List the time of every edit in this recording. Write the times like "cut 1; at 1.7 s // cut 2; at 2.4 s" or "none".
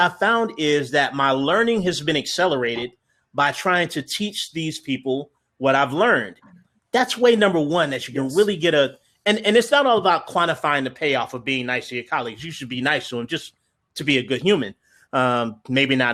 none